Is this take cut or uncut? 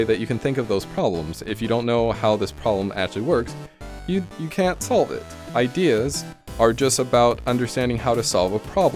uncut